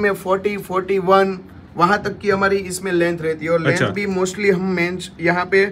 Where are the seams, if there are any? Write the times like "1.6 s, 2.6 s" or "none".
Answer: none